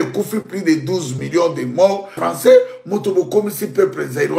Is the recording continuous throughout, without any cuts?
no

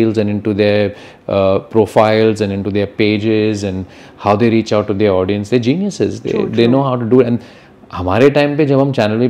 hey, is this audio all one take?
yes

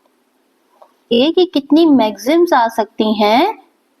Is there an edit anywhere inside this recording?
yes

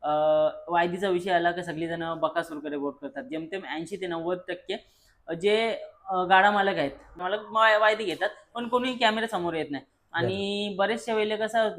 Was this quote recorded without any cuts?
no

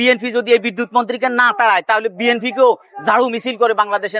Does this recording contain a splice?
no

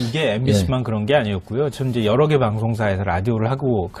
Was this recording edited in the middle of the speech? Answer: yes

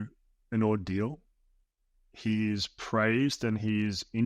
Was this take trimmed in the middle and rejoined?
no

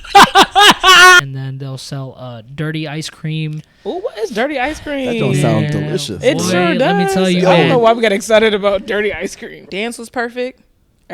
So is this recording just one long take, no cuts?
no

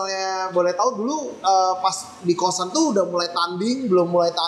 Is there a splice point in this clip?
no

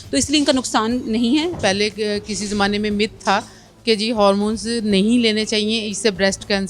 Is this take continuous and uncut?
no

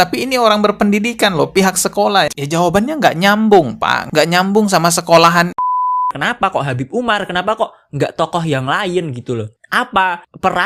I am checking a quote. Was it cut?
yes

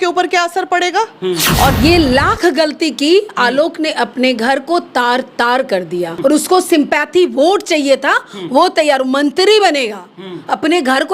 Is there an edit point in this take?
yes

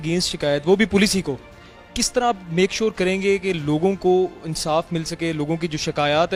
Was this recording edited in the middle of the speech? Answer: no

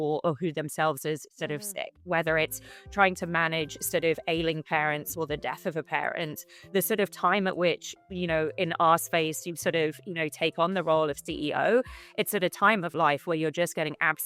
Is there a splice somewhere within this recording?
no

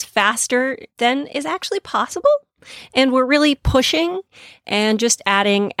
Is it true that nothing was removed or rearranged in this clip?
yes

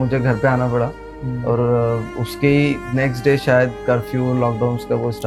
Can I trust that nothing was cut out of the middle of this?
yes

